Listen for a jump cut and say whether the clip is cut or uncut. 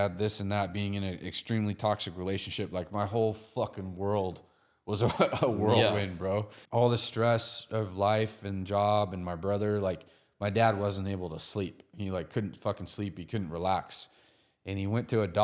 cut